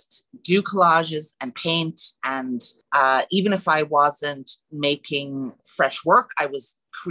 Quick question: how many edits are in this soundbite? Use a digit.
2